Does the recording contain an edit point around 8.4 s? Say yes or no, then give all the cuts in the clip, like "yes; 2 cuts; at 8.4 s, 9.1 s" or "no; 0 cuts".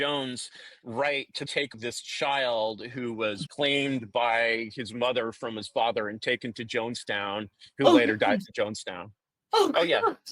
no; 2 cuts; at 1.7 s, 3.4 s